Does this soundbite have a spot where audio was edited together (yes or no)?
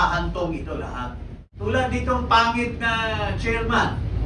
yes